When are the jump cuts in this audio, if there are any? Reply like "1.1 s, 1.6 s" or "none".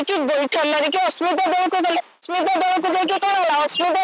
2.2 s